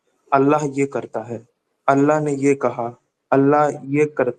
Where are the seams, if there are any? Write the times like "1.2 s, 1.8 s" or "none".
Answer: none